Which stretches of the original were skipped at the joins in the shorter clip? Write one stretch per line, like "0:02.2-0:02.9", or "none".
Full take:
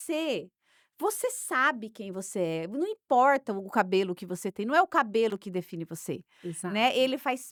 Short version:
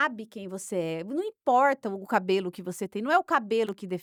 none